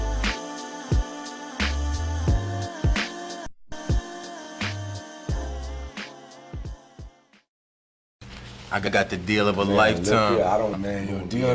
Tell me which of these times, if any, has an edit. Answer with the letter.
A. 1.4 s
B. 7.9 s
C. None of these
C